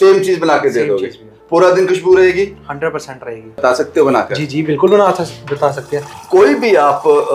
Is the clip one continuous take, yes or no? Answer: no